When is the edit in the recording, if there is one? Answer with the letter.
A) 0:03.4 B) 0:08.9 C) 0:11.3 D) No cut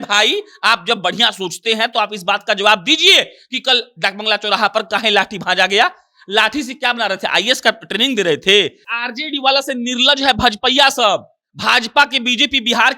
B